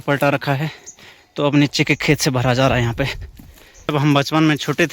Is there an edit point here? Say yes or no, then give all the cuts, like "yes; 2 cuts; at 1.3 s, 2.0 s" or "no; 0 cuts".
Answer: yes; 1 cut; at 3.9 s